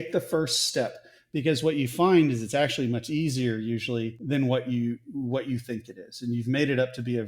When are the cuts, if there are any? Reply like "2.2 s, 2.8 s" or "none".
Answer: 4.2 s

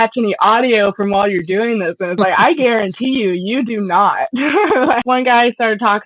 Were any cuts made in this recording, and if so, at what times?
5.0 s

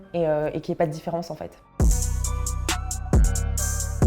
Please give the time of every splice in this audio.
1.6 s

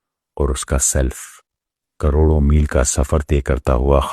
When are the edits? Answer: 3.0 s

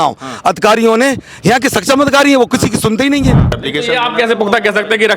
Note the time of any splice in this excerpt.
3.7 s

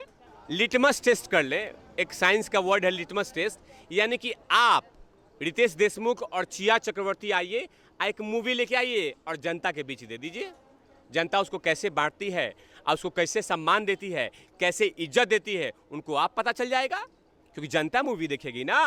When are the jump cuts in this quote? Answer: none

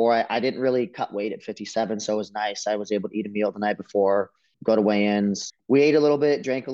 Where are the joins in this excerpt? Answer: 4.4 s, 5.5 s

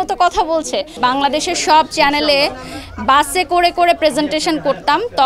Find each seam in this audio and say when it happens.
1.0 s

